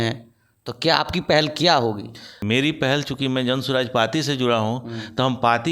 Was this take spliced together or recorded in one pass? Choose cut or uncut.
uncut